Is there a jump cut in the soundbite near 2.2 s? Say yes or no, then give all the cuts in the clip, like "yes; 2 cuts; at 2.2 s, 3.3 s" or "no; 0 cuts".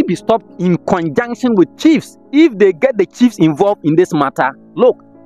yes; 1 cut; at 2.2 s